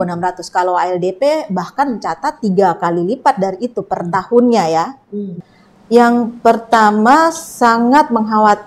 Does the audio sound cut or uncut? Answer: cut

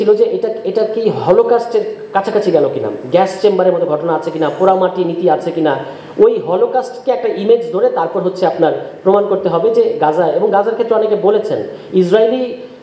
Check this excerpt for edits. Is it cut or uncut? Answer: uncut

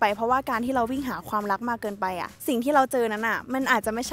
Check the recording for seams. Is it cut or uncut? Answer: uncut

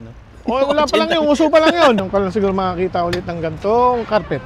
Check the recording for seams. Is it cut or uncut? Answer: cut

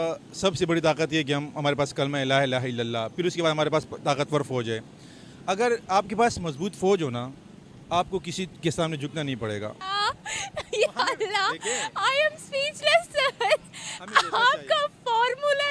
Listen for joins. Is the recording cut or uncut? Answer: cut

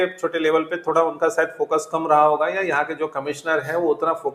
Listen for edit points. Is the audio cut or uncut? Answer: uncut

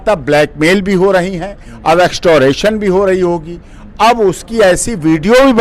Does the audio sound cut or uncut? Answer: uncut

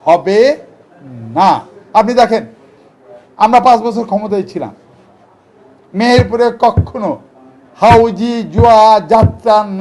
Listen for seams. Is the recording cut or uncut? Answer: uncut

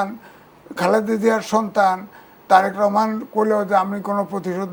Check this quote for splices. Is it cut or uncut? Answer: uncut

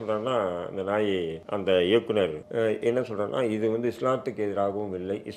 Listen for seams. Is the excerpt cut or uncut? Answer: cut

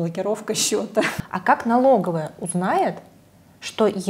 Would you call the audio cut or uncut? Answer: cut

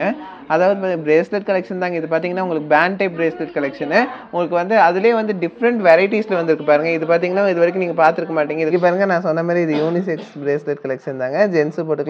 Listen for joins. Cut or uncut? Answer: cut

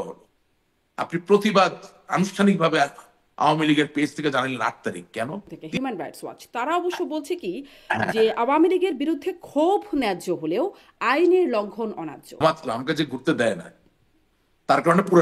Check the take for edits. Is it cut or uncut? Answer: cut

